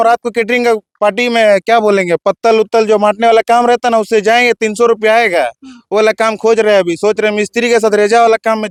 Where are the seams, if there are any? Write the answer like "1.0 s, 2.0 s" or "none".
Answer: none